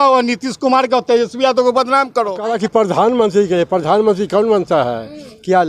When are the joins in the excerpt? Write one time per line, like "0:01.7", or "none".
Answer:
0:02.5